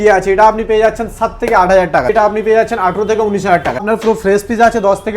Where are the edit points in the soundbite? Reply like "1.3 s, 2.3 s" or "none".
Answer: 2.1 s, 3.8 s